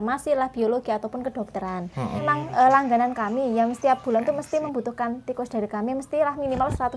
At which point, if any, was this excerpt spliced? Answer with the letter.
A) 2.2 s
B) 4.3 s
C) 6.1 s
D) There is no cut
A